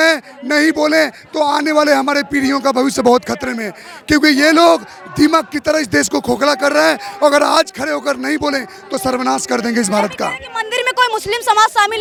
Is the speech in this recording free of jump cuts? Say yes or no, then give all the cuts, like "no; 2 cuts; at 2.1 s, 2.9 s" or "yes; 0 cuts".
yes; 0 cuts